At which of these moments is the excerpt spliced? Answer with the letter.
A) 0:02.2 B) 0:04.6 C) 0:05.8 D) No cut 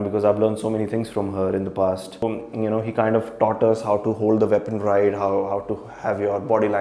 A